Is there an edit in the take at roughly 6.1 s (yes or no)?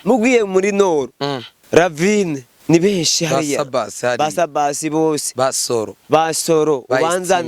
no